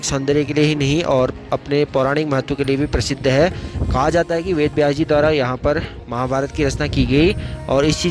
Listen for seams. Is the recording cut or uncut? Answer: uncut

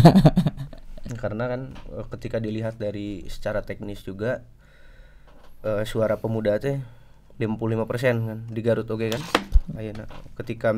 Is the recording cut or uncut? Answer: uncut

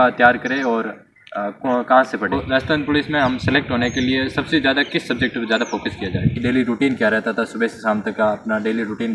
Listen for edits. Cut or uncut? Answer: cut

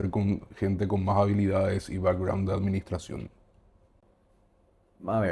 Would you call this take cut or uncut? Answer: uncut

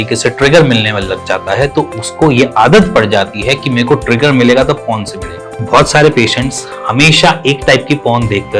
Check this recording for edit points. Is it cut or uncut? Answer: cut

